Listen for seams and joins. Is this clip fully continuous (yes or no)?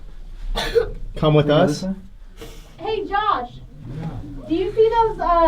no